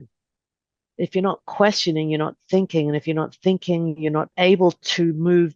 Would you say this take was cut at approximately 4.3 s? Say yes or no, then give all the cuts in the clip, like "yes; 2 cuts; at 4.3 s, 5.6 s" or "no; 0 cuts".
yes; 1 cut; at 4.3 s